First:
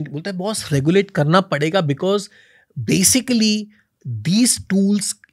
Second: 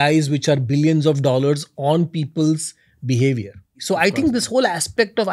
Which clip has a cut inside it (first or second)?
second